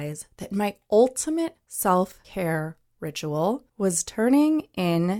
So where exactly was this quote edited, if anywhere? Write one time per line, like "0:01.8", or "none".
0:01.6
0:02.2
0:03.7